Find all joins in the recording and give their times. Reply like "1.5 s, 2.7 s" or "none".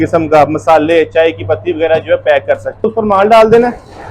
2.9 s

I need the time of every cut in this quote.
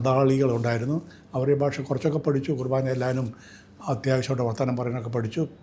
none

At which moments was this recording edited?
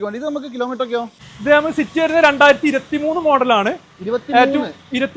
1.1 s

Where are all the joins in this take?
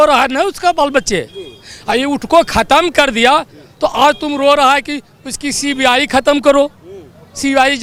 none

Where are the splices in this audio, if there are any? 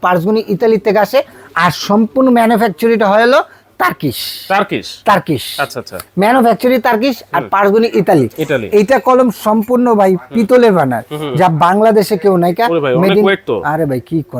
none

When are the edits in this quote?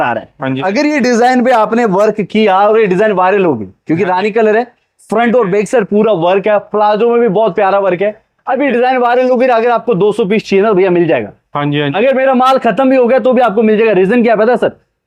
none

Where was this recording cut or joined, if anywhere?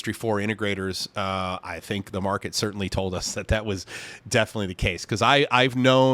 none

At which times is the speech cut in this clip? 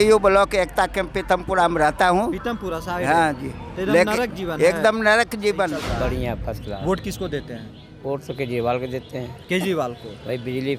5.8 s

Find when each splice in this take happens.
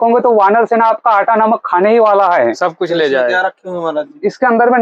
none

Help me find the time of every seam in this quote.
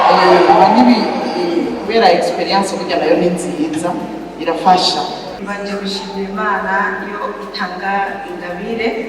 5.3 s

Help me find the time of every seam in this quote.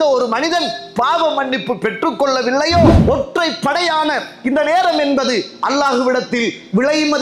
3.0 s

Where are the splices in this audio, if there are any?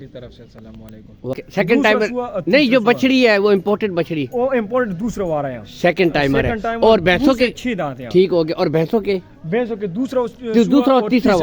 1.3 s

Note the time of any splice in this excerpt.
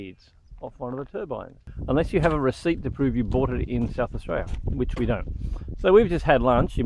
1.7 s

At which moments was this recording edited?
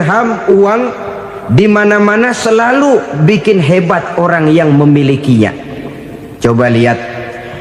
none

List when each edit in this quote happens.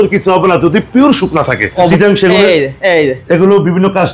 1.9 s

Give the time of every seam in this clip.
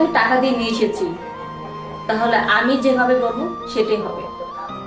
none

